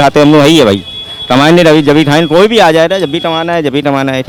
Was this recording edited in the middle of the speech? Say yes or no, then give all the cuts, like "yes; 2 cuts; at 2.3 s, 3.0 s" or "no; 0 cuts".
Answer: no; 0 cuts